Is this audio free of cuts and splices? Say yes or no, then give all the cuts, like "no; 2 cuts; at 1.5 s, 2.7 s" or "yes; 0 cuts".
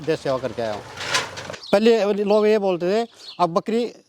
no; 1 cut; at 1.5 s